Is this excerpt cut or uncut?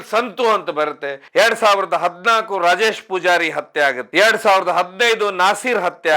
cut